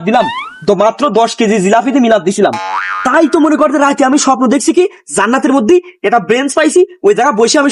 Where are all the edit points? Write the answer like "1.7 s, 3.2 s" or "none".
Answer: none